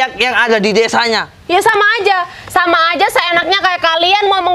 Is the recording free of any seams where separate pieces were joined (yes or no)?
yes